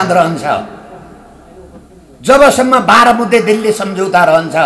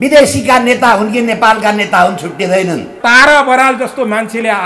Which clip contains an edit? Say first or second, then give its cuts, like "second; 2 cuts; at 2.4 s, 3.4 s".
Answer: second; 1 cut; at 2.9 s